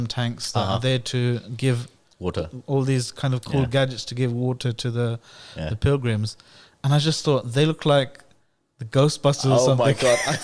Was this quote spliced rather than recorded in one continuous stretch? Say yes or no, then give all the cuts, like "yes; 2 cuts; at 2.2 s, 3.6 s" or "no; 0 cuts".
no; 0 cuts